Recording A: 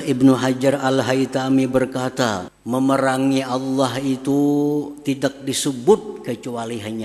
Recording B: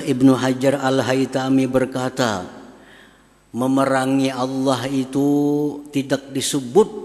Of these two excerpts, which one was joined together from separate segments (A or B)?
A